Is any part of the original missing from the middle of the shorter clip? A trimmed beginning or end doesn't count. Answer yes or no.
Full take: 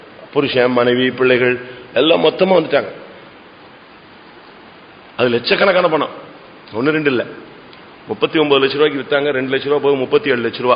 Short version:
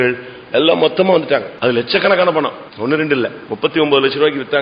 yes